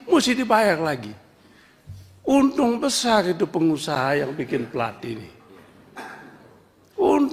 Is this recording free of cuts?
yes; 0 cuts

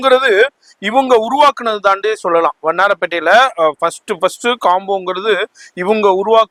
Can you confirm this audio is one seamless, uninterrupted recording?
yes; 0 cuts

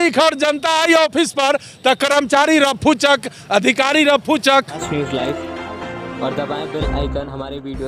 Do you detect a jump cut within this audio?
yes; 1 cut; at 4.8 s

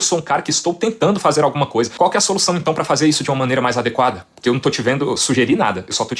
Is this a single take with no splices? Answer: yes; 0 cuts

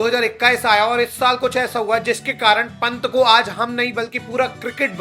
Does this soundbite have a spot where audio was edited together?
no; 0 cuts

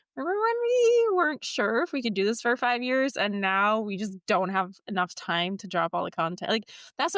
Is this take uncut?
yes; 0 cuts

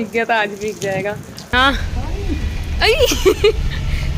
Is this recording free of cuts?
no; 1 cut; at 1.4 s

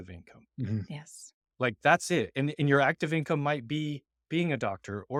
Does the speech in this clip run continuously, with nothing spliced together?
yes; 0 cuts

